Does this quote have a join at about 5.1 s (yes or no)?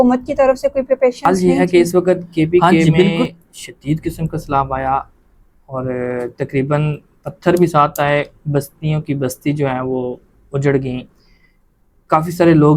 no